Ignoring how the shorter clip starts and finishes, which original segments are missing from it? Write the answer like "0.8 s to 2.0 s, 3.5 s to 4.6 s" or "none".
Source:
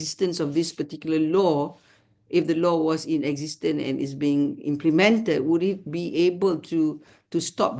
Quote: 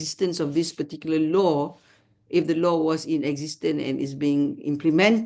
none